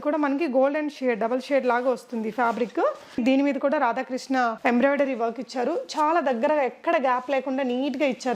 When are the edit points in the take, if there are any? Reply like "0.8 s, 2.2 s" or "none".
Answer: 3.2 s